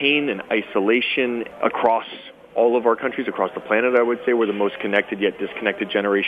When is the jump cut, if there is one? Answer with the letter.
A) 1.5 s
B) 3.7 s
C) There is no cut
A